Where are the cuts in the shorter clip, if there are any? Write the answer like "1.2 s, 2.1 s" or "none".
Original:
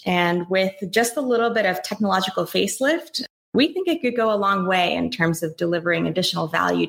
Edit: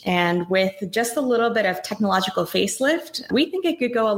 3.1 s